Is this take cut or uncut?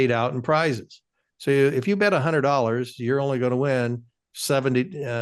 uncut